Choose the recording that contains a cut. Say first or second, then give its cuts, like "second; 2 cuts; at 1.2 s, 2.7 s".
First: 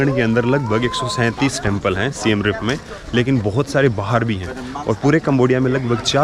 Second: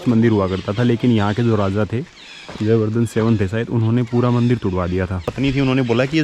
second; 1 cut; at 5.2 s